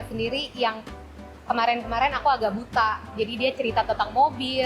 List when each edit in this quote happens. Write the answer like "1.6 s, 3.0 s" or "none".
none